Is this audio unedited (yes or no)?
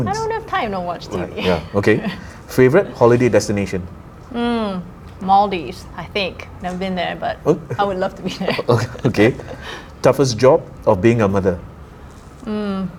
yes